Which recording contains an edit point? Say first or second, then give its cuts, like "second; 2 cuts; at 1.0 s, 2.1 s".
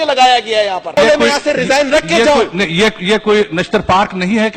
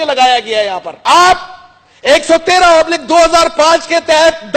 first; 1 cut; at 0.9 s